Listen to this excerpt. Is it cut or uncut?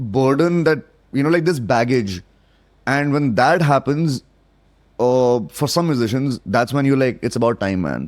uncut